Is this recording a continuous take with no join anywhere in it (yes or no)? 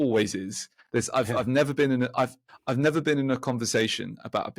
yes